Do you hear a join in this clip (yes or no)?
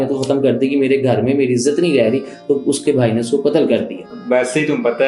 yes